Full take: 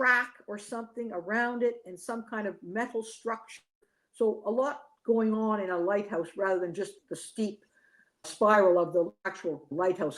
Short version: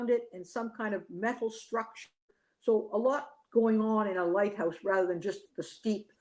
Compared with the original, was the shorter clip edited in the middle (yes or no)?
no